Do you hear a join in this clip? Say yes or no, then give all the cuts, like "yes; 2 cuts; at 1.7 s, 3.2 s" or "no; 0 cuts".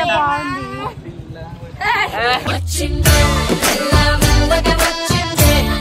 no; 0 cuts